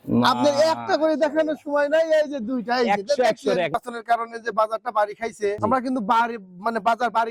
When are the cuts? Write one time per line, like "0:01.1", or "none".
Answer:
0:03.8
0:05.6